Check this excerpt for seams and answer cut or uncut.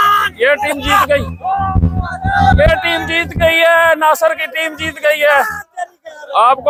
uncut